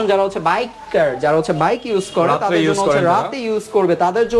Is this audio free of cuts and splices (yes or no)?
yes